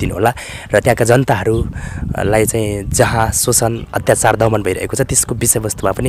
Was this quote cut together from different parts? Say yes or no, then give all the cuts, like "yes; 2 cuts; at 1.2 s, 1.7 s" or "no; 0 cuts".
no; 0 cuts